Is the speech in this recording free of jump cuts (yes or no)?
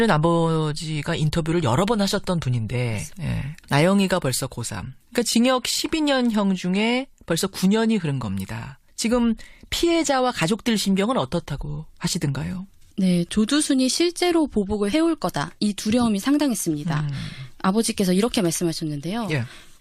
no